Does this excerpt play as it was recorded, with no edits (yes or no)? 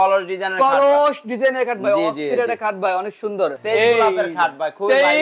no